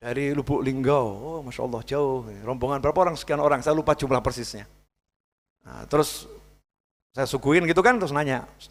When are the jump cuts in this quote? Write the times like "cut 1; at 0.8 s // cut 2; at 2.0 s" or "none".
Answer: none